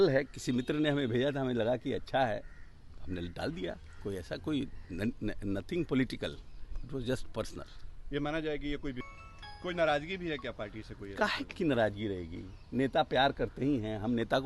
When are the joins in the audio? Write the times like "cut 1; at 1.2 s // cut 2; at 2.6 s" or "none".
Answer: cut 1; at 9.0 s